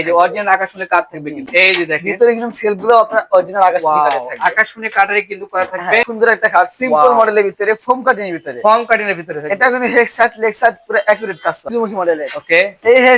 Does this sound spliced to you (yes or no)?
yes